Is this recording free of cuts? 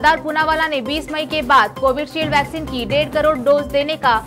yes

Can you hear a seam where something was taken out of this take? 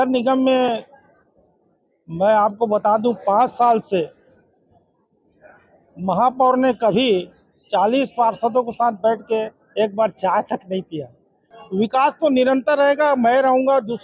yes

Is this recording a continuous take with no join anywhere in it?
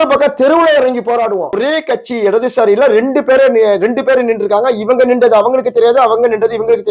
no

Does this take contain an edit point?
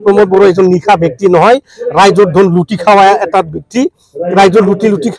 no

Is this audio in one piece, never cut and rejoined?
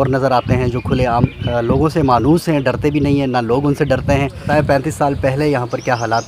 no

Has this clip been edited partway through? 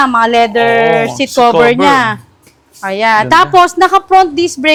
no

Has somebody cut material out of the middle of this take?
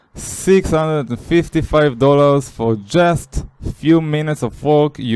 no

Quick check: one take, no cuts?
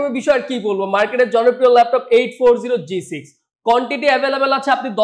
yes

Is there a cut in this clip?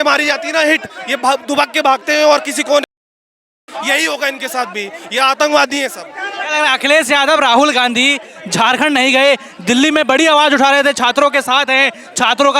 no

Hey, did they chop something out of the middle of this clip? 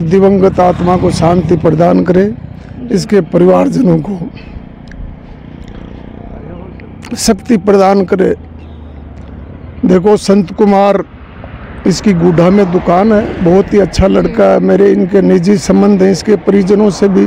no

